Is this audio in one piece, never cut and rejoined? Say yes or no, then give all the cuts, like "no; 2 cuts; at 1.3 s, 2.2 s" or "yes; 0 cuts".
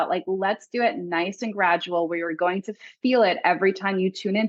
yes; 0 cuts